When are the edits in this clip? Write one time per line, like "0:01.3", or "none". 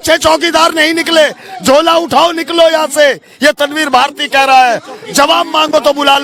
none